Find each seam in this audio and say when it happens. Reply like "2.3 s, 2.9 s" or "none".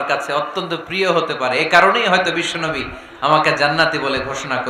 none